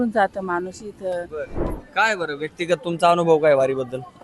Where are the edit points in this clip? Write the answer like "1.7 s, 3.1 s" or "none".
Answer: 1.6 s